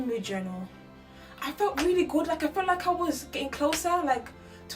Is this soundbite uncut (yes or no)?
yes